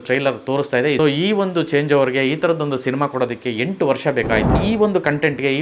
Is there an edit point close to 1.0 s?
yes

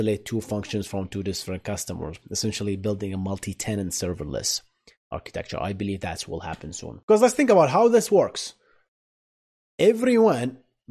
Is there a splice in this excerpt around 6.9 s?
yes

